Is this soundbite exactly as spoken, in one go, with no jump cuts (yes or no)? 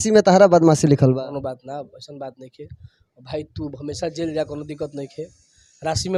yes